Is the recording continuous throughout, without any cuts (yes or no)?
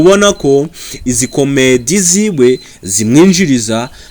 yes